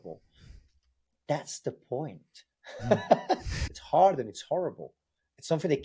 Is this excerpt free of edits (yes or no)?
no